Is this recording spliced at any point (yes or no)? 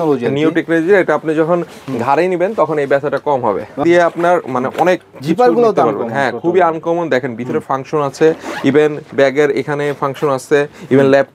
yes